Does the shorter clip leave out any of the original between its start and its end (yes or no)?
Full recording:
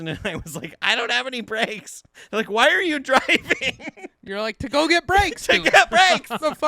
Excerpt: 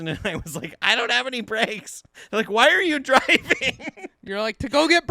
no